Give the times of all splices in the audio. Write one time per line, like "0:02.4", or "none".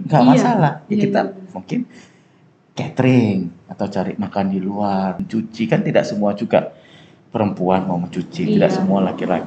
0:05.2